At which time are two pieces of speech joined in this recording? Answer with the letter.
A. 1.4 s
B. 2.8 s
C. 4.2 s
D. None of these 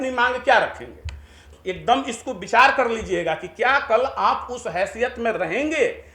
A